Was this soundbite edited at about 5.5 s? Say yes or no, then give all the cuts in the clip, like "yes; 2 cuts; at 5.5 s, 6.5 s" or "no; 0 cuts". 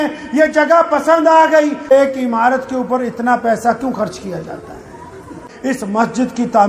yes; 2 cuts; at 1.9 s, 5.5 s